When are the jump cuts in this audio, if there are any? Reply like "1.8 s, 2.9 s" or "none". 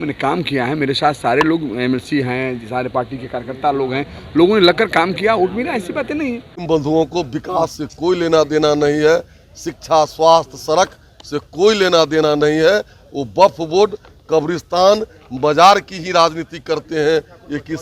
6.5 s